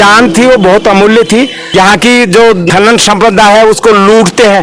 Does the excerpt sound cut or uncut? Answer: cut